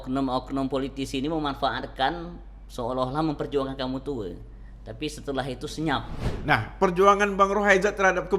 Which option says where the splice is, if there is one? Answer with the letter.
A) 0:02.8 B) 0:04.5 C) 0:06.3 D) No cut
C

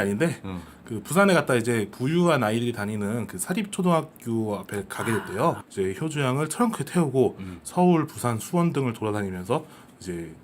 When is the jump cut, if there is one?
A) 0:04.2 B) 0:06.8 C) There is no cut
B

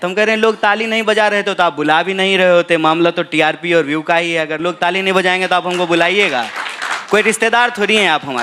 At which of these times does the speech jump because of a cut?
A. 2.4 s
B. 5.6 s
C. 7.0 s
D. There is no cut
D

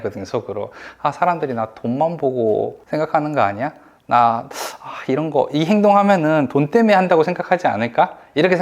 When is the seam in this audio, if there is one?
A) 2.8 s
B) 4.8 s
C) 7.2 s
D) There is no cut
A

